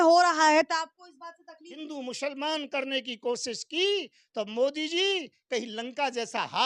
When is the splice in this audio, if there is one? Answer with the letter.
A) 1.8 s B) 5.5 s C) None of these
A